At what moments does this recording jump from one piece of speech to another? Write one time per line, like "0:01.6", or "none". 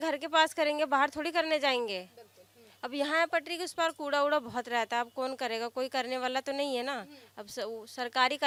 none